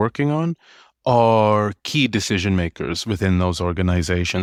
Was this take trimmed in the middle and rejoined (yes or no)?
no